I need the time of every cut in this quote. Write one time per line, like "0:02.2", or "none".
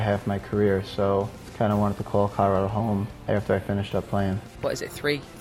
0:01.4
0:03.2
0:04.5